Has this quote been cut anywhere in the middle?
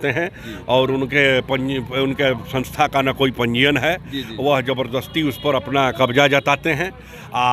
no; 0 cuts

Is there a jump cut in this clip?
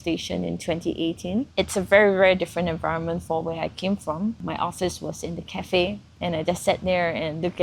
yes; 3 cuts; at 1.5 s, 4.4 s, 6.1 s

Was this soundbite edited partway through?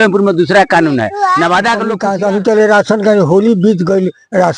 yes; 1 cut; at 1.9 s

